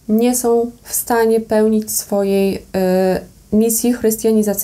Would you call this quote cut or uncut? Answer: uncut